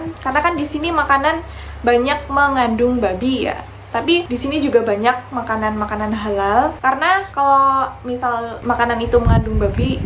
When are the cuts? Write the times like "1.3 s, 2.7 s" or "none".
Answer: none